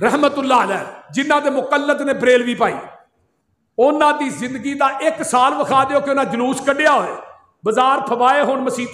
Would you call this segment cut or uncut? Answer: uncut